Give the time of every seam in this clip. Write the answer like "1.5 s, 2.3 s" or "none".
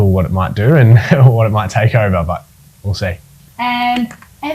3.4 s